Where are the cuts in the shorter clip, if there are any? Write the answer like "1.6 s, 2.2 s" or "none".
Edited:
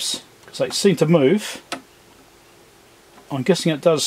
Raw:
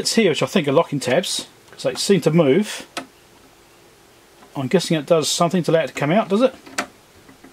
none